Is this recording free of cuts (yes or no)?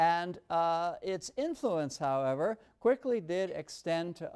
yes